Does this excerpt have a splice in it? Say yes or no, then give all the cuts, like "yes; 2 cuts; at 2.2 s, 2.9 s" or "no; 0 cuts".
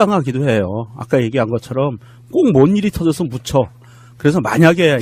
yes; 1 cut; at 4.0 s